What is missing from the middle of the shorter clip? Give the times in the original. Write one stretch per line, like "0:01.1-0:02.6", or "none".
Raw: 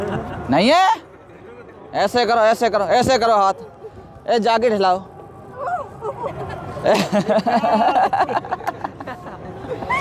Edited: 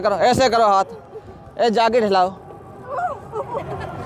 none